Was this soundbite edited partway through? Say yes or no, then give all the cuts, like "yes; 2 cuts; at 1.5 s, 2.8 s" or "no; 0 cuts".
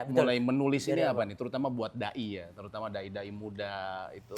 no; 0 cuts